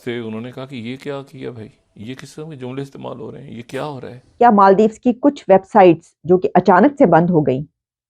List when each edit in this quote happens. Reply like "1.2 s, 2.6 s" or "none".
4.3 s